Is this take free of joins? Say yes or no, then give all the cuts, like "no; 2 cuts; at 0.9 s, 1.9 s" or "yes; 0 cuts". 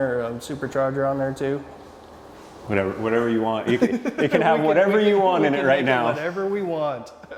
yes; 0 cuts